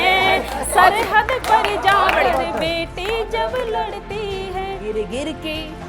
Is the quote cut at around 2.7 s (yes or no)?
no